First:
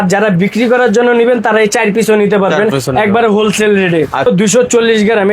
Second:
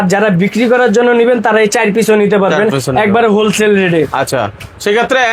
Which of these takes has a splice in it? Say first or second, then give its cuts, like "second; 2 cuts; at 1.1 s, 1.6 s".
first; 1 cut; at 4.3 s